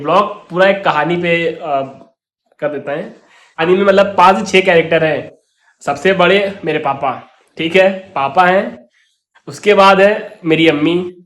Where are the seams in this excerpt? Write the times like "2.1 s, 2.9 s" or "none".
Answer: 3.6 s

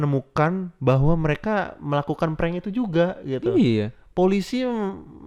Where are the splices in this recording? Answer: none

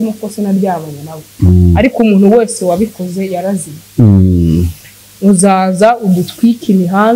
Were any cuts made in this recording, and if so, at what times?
none

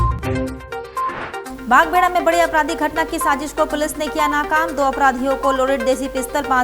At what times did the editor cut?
1.4 s

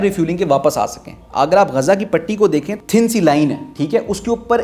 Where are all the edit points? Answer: 1.1 s, 2.7 s

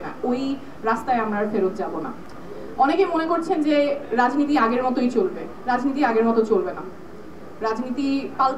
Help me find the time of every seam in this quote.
none

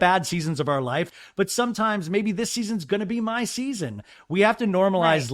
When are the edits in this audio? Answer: 1.1 s

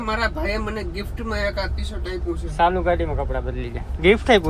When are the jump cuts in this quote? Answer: none

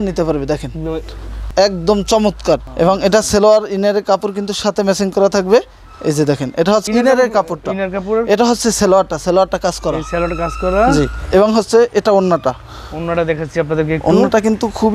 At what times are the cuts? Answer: none

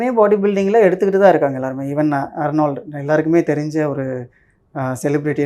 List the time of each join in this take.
none

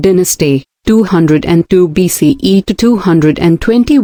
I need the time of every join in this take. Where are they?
none

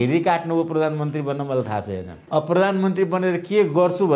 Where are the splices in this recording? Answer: 2.1 s

